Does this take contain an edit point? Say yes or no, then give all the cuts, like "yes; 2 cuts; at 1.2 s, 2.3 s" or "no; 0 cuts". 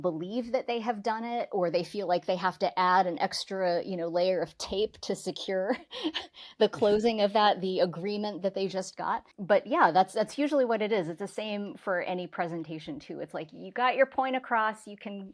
yes; 1 cut; at 9.3 s